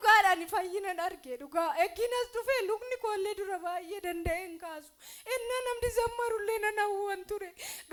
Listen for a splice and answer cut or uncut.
uncut